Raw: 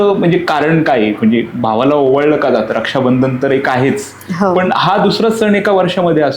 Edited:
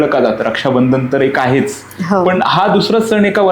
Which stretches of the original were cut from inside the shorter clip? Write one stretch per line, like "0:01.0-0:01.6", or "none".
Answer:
none